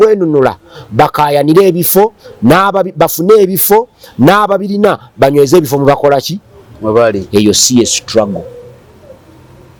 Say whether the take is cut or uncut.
uncut